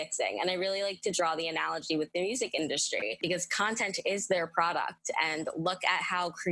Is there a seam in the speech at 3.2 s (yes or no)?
yes